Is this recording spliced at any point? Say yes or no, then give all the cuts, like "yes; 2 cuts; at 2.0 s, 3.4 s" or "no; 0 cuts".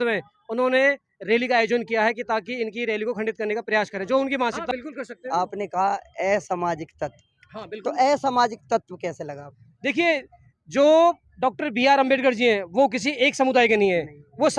yes; 1 cut; at 4.6 s